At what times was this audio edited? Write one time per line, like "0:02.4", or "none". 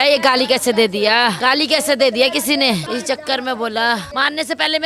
0:01.4
0:02.8
0:04.1